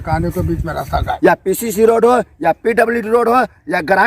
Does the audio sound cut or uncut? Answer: cut